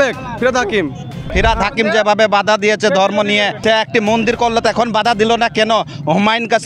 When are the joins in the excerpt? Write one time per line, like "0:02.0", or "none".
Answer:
0:01.3
0:03.5